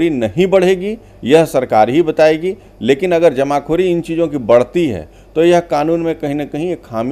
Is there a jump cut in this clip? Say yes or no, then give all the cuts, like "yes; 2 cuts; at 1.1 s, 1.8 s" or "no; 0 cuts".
no; 0 cuts